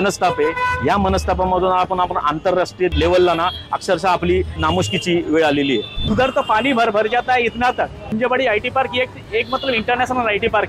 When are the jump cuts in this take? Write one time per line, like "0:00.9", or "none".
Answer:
0:02.9
0:04.6
0:05.9
0:08.0